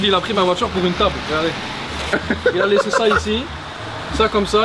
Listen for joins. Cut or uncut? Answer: uncut